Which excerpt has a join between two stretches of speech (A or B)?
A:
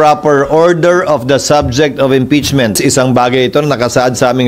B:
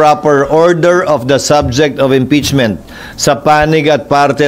A